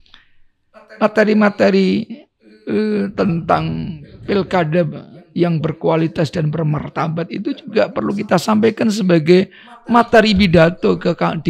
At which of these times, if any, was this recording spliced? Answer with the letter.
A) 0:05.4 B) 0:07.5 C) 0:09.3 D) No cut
D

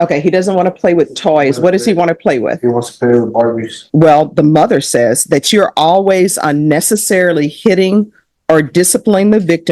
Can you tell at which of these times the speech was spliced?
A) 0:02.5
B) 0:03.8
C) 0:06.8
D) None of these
B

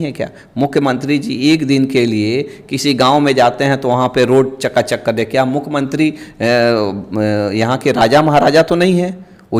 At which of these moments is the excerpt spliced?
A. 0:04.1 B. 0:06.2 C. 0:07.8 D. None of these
D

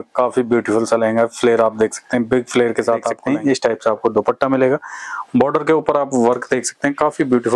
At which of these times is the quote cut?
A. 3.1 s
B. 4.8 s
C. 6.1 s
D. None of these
A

